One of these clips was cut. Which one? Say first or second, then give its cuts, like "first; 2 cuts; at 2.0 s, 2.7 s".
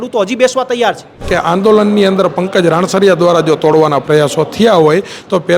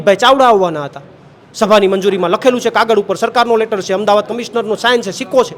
first; 1 cut; at 1.2 s